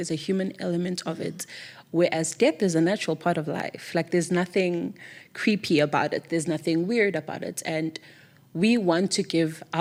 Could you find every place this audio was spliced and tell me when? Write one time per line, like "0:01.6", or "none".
none